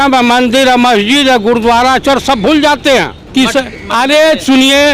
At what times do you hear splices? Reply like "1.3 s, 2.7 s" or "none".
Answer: 3.2 s